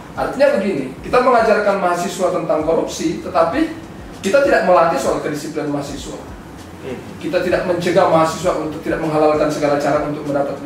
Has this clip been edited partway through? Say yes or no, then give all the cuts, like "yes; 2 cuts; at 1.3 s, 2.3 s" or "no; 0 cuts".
no; 0 cuts